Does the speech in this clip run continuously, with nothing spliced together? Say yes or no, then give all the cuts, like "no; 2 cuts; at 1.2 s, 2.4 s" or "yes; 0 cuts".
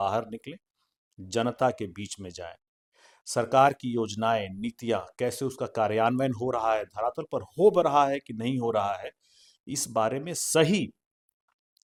yes; 0 cuts